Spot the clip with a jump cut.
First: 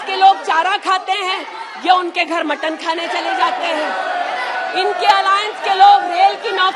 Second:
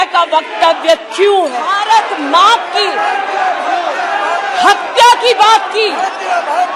second; 1 cut; at 1.7 s

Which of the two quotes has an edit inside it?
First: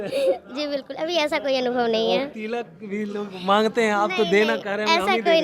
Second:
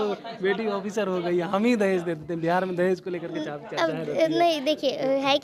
first; 1 cut; at 2.4 s

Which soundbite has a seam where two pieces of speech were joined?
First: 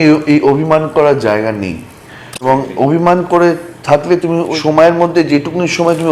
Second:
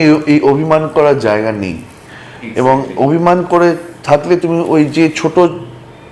first; 2 cuts; at 2.4 s, 4.5 s

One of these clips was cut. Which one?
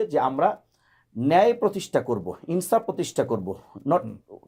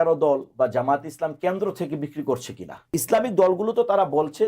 second; 1 cut; at 2.9 s

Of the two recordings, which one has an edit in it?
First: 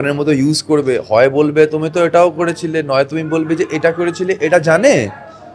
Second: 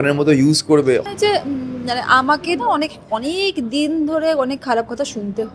second; 1 cut; at 1.0 s

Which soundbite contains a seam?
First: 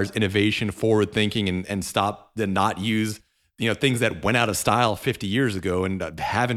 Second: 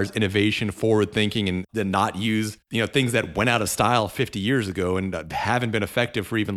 second; 2 cuts; at 1.6 s, 2.6 s

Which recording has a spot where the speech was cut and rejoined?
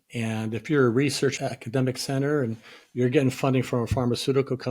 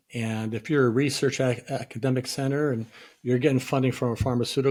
first; 1 cut; at 1.3 s

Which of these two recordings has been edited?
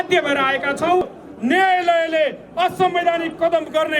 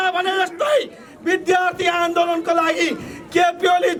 first; 1 cut; at 1.2 s

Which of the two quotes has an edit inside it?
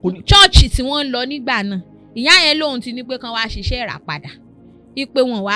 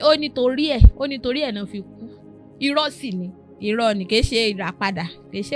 second; 1 cut; at 3.4 s

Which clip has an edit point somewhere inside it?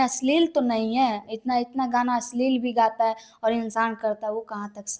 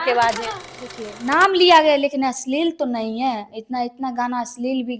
second; 1 cut; at 1.1 s

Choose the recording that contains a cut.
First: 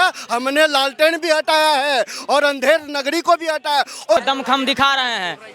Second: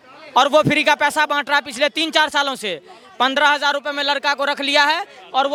first; 1 cut; at 4.2 s

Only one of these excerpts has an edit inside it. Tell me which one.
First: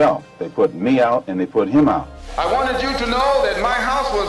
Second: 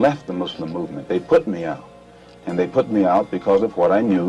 first; 1 cut; at 2.2 s

